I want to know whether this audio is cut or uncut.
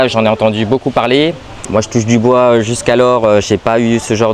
uncut